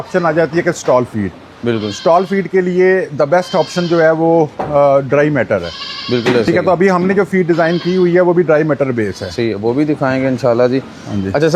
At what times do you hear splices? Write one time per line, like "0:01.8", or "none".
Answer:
none